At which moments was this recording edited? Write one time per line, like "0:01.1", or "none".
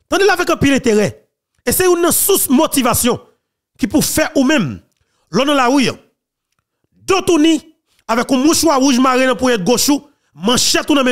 none